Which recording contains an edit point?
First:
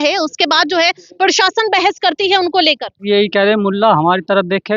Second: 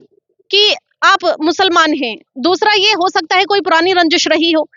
first; 1 cut; at 3.0 s

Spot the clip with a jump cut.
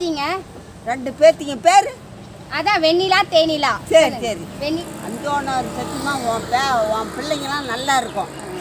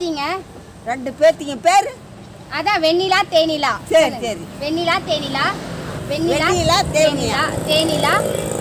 first; 1 cut; at 4.8 s

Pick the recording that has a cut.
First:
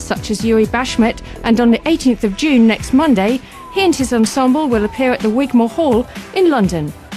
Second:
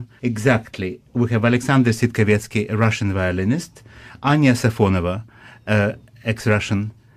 first; 1 cut; at 3.2 s

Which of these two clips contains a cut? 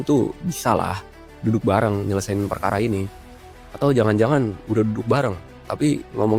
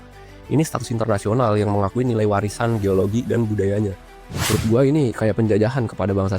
second; 1 cut; at 4.5 s

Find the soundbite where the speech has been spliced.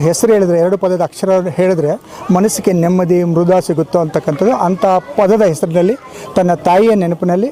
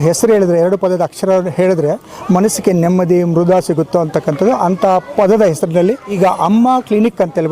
second; 1 cut; at 6.1 s

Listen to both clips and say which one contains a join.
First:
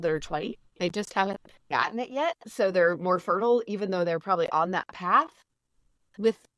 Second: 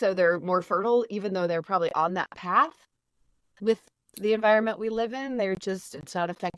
first; 1 cut; at 1.6 s

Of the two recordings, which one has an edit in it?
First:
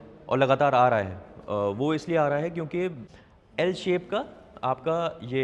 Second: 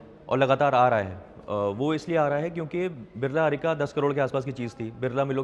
first; 1 cut; at 3.0 s

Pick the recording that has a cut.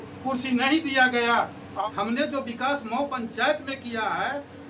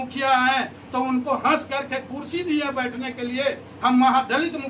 first; 1 cut; at 1.7 s

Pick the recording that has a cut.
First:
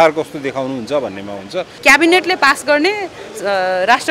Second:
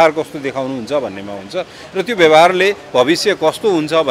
first; 1 cut; at 1.8 s

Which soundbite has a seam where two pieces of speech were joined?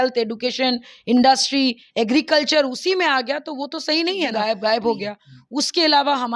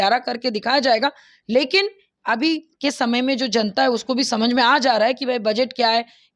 first; 1 cut; at 4.3 s

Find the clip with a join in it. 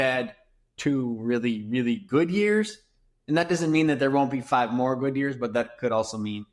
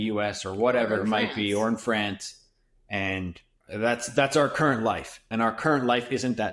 second; 2 cuts; at 3.5 s, 5.2 s

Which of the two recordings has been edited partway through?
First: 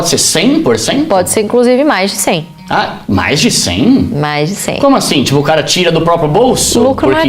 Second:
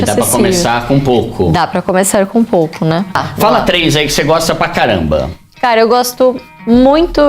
second; 1 cut; at 3.2 s

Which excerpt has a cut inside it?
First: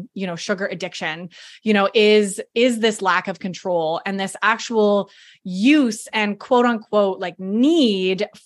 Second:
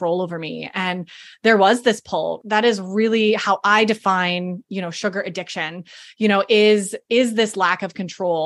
second; 1 cut; at 2.4 s

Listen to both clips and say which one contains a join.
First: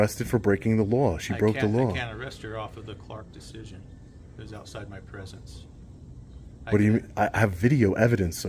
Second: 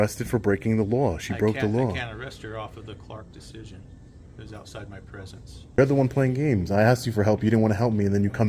second; 1 cut; at 5.8 s

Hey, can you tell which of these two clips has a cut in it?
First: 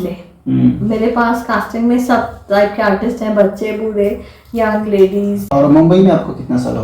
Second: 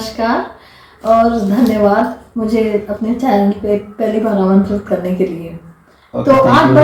first; 1 cut; at 5.4 s

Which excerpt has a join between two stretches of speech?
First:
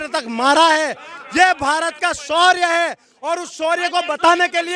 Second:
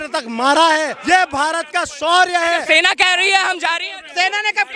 second; 2 cuts; at 1.0 s, 2.6 s

